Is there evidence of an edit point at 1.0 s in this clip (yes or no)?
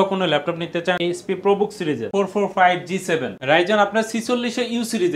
yes